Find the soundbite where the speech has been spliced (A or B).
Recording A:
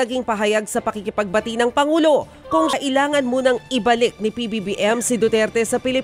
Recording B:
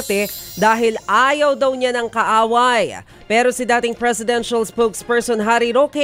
A